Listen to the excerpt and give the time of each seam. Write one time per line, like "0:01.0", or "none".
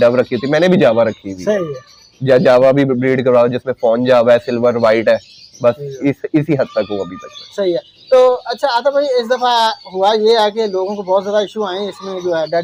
none